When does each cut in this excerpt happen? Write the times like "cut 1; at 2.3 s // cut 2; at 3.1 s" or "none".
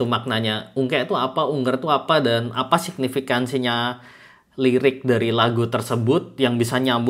none